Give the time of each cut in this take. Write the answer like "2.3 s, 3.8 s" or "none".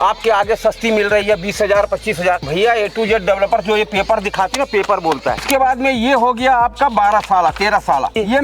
5.4 s